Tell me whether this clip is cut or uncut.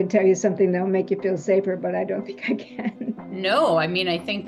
cut